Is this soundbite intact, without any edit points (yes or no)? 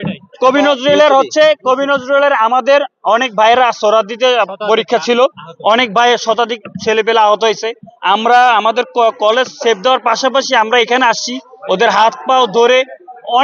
yes